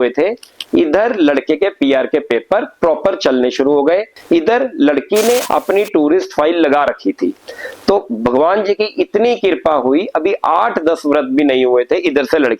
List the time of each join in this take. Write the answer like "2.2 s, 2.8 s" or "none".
4.1 s, 5.4 s